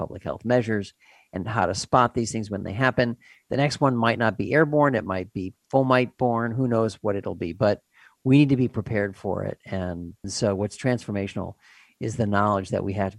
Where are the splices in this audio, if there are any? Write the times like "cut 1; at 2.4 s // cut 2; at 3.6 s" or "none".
none